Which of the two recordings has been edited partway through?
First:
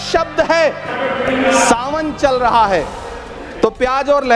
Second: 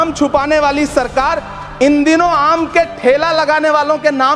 first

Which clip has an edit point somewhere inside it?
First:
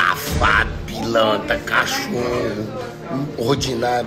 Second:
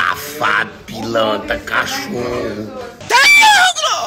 first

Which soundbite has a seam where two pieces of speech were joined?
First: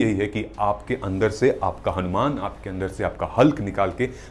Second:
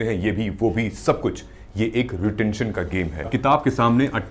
second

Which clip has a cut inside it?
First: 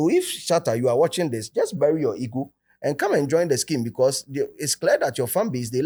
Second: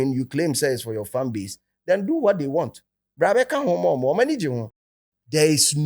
second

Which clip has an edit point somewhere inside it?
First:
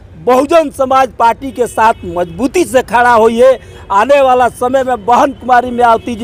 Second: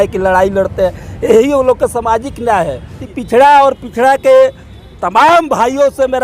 second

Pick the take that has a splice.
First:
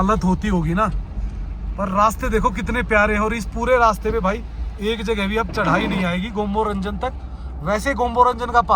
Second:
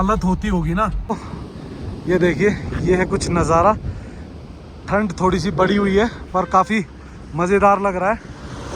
second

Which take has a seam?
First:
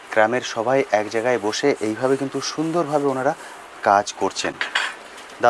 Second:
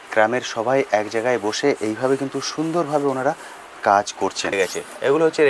second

